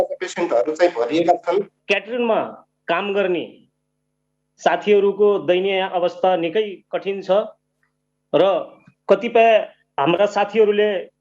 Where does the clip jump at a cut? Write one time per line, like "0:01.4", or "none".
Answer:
0:01.8